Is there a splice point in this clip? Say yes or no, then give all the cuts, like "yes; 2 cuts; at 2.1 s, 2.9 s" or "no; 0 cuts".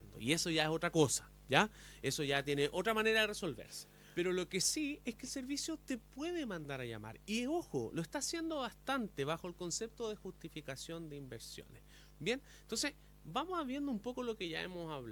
no; 0 cuts